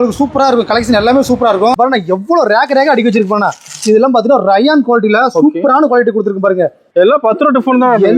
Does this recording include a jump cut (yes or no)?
yes